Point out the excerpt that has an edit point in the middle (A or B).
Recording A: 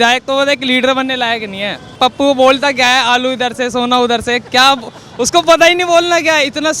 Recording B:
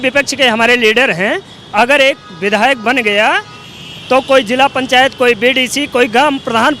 A